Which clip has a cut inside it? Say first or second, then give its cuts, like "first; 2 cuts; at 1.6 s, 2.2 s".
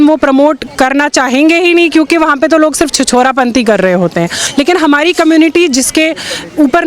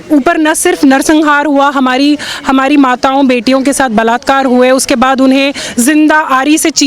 first; 1 cut; at 4.4 s